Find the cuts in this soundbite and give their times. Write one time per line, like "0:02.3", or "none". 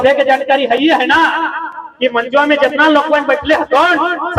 none